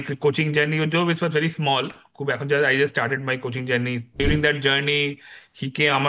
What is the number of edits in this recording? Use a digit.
1